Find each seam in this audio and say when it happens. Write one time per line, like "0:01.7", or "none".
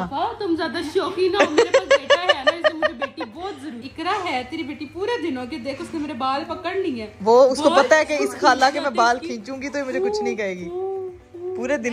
none